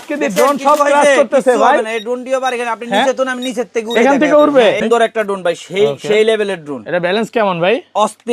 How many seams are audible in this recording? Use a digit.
1